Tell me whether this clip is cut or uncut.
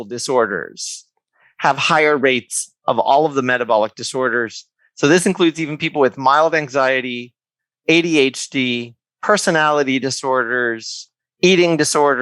uncut